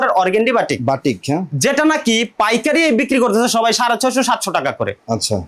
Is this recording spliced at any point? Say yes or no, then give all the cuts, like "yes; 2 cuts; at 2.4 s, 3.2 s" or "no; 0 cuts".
no; 0 cuts